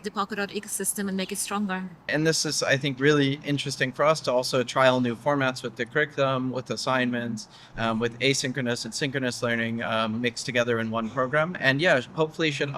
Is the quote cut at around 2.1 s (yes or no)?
yes